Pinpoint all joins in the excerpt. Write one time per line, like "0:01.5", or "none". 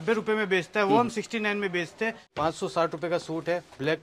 0:02.3